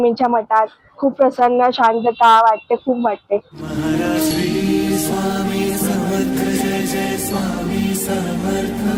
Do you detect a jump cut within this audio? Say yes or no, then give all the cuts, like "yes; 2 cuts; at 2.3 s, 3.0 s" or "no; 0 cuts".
no; 0 cuts